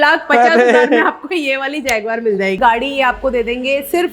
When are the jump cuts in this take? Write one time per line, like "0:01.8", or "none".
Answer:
0:02.6